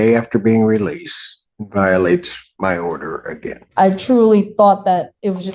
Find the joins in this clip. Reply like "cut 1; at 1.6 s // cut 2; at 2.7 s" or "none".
cut 1; at 3.6 s